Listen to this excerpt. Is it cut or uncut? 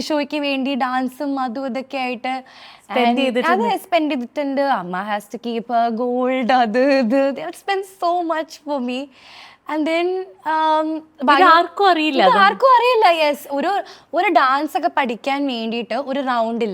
uncut